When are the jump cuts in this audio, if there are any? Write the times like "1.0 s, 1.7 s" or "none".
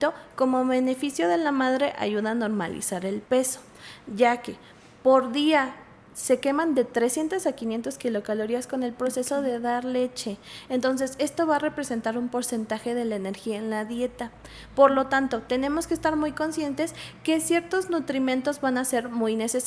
none